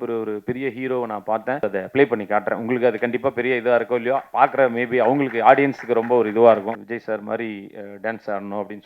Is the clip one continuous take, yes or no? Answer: no